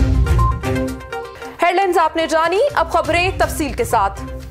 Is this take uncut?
yes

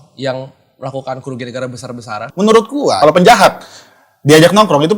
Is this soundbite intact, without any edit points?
no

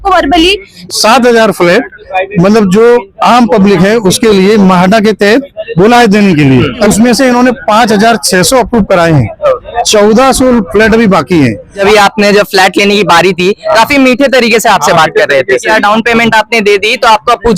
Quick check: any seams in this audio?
yes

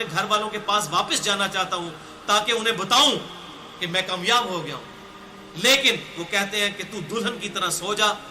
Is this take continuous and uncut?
yes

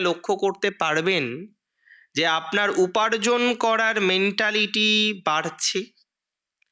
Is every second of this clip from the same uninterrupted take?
yes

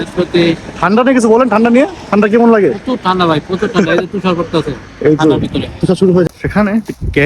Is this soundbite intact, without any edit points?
no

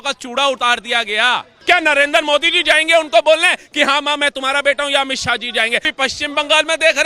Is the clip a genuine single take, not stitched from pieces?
no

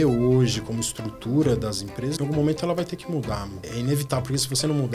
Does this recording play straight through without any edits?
no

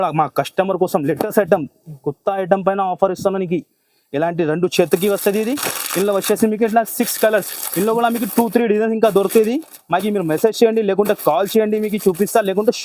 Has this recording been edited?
no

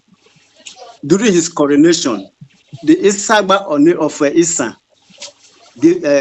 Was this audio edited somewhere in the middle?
no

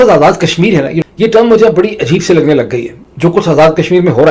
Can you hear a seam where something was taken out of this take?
yes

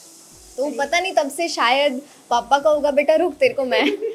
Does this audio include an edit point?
no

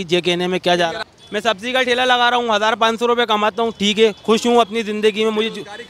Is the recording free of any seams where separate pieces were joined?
no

